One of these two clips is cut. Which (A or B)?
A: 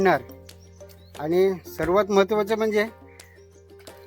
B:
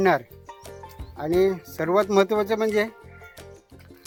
A